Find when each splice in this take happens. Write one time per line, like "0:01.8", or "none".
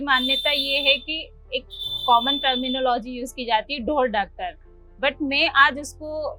none